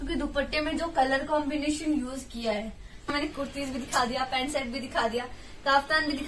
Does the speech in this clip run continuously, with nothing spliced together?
no; 1 cut; at 3.1 s

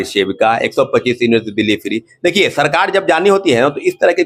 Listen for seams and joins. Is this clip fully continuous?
yes; 0 cuts

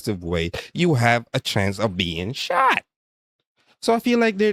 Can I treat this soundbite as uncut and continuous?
yes; 0 cuts

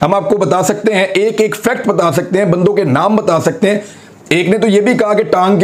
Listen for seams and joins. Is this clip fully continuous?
no; 1 cut; at 3.9 s

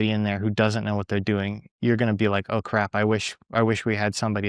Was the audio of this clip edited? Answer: no; 0 cuts

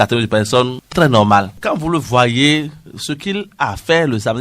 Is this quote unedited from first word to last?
no; 1 cut; at 1.5 s

